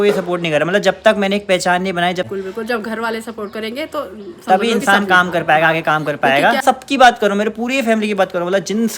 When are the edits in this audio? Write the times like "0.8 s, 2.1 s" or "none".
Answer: 2.3 s, 6.6 s